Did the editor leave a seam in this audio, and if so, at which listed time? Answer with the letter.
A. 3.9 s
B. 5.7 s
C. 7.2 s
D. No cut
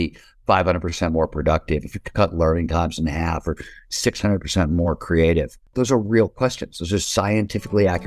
B